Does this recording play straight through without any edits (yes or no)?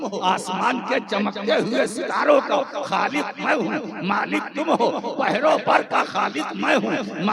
yes